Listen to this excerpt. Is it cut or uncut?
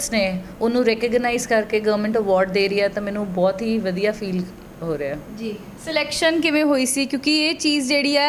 uncut